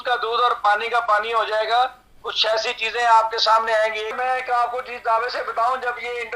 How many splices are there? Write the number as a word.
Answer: one